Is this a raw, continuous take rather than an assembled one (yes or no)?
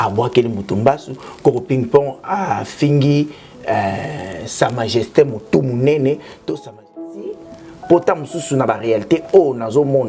no